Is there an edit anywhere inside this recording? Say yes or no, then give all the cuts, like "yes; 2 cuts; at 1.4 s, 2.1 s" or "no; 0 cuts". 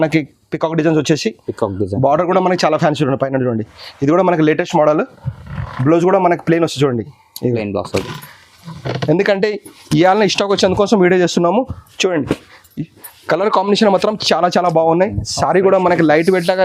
yes; 1 cut; at 8.0 s